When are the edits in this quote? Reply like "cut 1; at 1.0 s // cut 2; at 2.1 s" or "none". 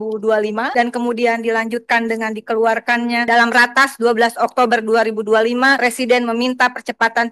none